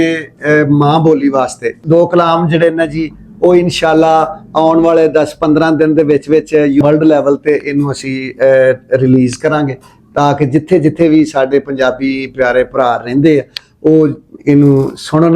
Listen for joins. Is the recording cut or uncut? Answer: cut